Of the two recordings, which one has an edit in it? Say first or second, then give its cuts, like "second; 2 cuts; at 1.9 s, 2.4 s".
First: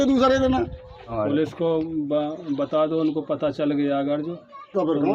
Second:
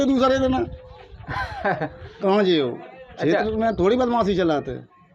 first; 1 cut; at 1.2 s